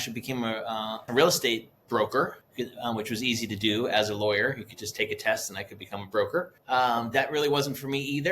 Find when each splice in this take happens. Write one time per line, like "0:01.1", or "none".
0:01.0
0:02.4
0:06.6